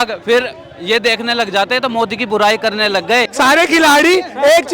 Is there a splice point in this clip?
yes; 1 cut; at 3.3 s

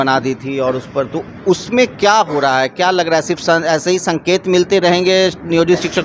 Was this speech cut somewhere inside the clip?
no; 0 cuts

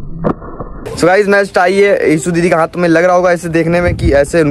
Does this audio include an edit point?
yes; 1 cut; at 0.9 s

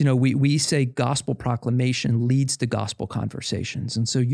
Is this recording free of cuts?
yes; 0 cuts

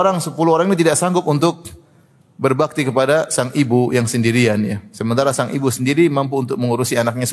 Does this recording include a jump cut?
no; 0 cuts

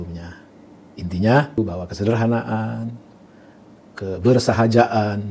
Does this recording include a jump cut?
yes; 1 cut; at 1.6 s

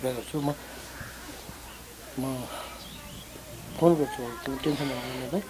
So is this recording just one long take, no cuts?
yes; 0 cuts

